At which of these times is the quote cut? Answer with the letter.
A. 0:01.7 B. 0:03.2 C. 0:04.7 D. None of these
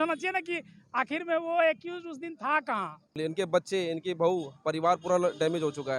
B